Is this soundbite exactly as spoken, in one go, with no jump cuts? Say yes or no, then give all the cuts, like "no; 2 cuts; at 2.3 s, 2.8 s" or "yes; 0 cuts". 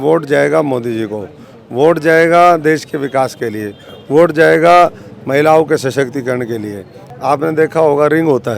no; 1 cut; at 7.0 s